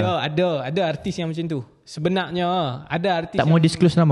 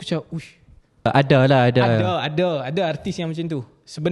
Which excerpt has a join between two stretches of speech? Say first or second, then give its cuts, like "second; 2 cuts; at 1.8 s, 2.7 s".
second; 1 cut; at 1.1 s